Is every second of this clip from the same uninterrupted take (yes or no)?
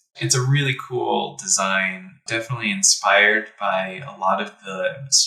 no